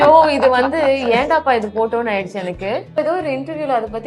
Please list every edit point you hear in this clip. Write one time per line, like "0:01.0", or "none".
0:03.0